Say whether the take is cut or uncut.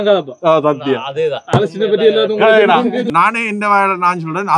cut